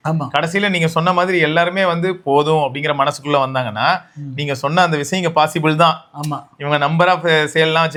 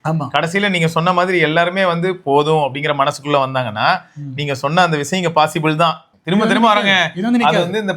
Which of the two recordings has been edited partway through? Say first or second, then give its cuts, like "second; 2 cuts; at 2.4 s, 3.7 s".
second; 1 cut; at 6.1 s